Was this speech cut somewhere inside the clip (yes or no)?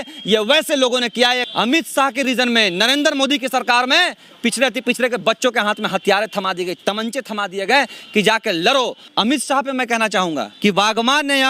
yes